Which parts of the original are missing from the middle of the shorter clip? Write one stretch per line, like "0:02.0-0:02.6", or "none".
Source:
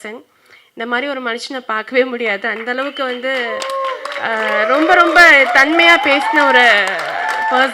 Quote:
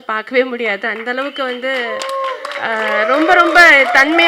none